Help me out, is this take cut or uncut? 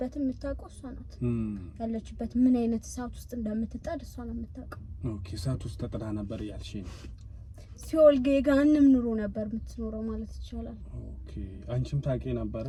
uncut